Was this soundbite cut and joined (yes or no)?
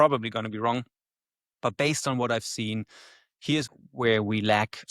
yes